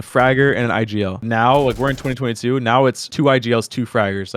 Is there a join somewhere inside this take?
yes; 2 cuts; at 1.2 s, 3.0 s

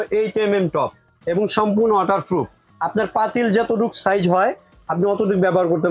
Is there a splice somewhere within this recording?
yes; 2 cuts; at 1.1 s, 2.6 s

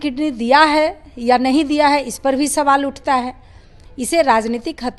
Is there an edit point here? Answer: no; 0 cuts

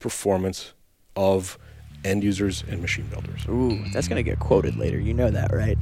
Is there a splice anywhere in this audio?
no; 0 cuts

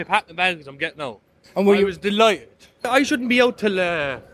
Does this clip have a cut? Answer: yes; 2 cuts; at 1.3 s, 2.9 s

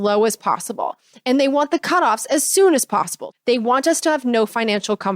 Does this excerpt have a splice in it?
yes; 1 cut; at 3.2 s

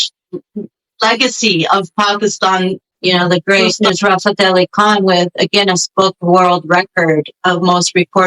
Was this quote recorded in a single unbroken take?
no; 1 cut; at 3.4 s

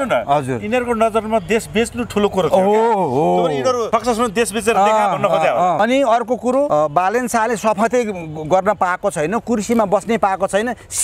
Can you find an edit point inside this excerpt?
yes; 3 cuts; at 3.8 s, 5.8 s, 6.7 s

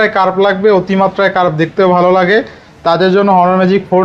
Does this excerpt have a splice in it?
no; 0 cuts

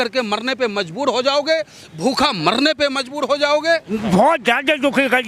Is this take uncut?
no; 1 cut; at 3.9 s

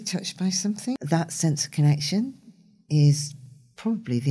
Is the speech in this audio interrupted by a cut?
yes; 1 cut; at 1.0 s

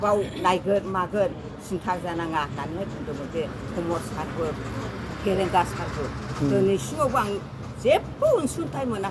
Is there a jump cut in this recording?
no; 0 cuts

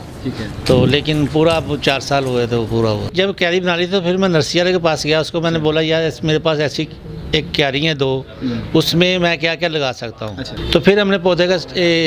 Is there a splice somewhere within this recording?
yes; 2 cuts; at 3.1 s, 10.6 s

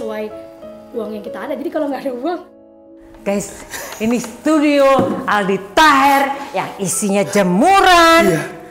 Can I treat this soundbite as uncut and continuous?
no; 1 cut; at 2.6 s

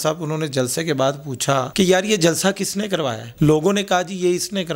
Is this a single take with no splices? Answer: no; 2 cuts; at 1.7 s, 3.2 s

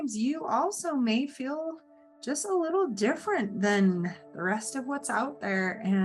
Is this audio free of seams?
yes; 0 cuts

